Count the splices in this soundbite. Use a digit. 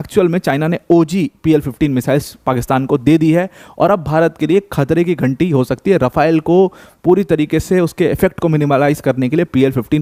0